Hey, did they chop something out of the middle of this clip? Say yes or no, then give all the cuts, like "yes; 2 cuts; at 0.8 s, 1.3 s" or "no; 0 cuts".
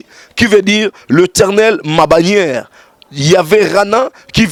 no; 0 cuts